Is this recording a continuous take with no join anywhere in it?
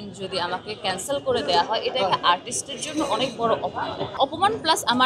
no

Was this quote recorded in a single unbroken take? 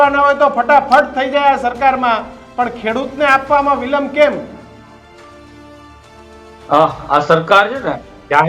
yes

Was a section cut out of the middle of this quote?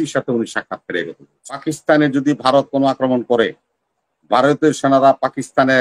yes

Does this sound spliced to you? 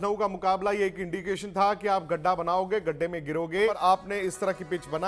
yes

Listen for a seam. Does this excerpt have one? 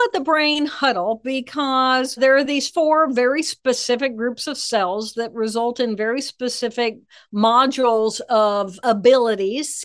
yes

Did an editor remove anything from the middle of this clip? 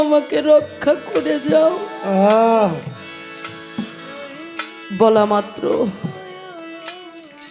no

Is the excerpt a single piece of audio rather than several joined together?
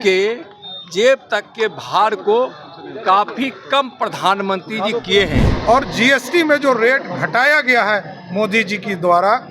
no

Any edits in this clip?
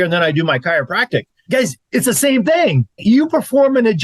yes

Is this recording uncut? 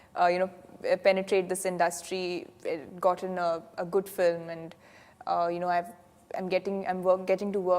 yes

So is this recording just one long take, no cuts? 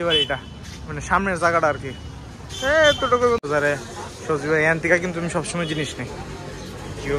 no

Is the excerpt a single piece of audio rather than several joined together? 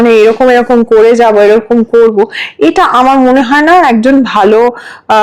yes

